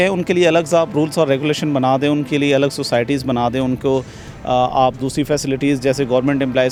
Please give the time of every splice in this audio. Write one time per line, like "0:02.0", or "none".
none